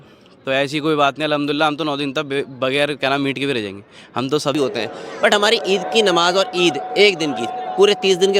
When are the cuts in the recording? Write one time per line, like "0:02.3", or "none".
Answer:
0:04.5